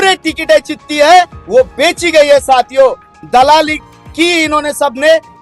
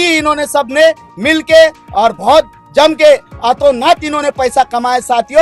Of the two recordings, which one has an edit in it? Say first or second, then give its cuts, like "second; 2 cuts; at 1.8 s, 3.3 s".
first; 1 cut; at 3.1 s